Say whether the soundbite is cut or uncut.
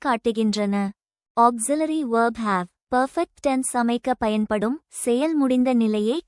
cut